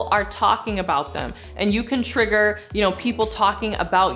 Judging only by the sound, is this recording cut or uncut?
uncut